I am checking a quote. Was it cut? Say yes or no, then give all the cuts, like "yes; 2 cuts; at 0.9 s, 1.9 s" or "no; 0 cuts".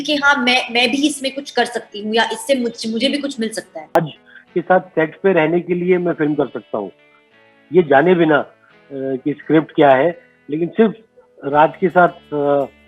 yes; 1 cut; at 4.0 s